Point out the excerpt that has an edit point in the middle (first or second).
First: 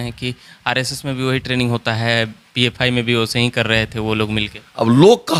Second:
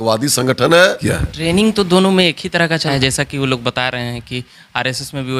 second